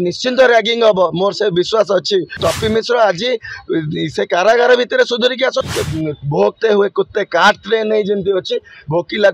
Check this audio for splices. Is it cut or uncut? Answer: cut